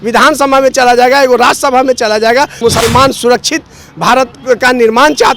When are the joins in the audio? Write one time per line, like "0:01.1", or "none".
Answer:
0:02.6